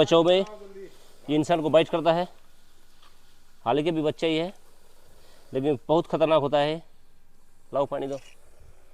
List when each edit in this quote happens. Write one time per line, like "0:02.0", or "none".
none